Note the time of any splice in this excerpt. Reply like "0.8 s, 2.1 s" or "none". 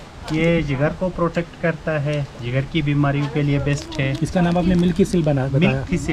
none